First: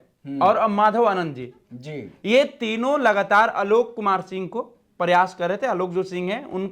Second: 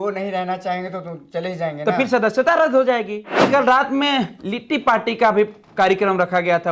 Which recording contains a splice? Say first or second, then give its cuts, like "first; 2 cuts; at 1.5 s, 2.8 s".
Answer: second; 1 cut; at 3.5 s